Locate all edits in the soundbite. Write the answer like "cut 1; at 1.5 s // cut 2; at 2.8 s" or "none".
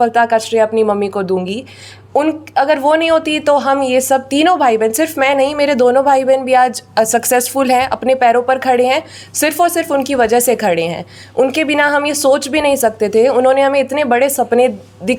none